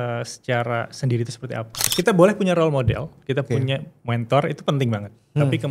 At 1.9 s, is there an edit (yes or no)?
yes